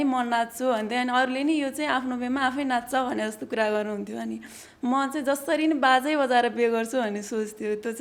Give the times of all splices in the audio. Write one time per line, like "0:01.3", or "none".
none

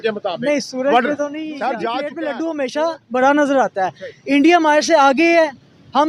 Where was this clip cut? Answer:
0:02.1

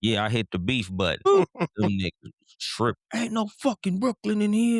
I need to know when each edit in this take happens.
0:01.3

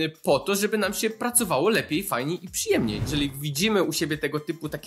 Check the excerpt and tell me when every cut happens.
0:03.0

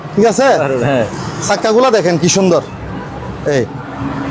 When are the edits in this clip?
0:03.4

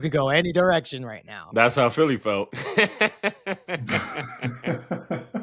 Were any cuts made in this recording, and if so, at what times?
0:04.0

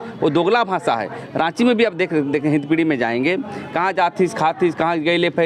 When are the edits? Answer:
none

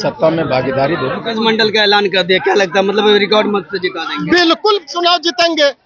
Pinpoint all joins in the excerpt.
0:01.3

